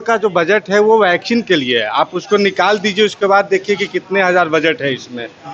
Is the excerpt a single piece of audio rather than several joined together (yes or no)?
yes